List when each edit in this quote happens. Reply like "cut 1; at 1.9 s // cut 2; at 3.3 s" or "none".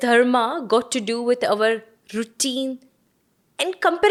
none